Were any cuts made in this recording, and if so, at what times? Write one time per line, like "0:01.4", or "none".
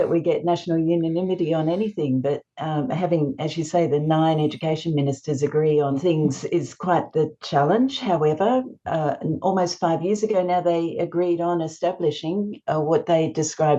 0:06.0